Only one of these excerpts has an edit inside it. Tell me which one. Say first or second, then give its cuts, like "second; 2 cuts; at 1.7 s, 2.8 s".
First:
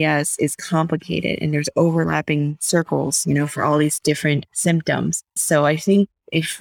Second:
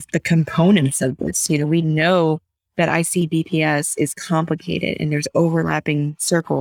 first; 2 cuts; at 4.5 s, 5.4 s